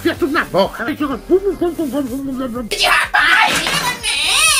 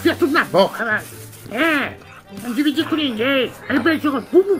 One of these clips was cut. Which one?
first; 2 cuts; at 0.9 s, 2.7 s

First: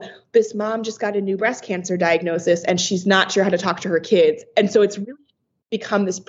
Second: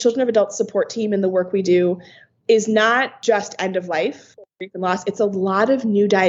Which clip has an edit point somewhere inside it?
second; 2 cuts; at 3.1 s, 4.4 s

